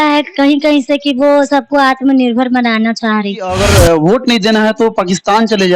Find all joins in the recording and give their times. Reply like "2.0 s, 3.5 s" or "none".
3.5 s